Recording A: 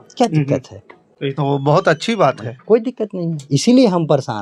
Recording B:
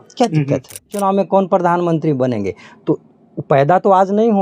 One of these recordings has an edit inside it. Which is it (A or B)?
B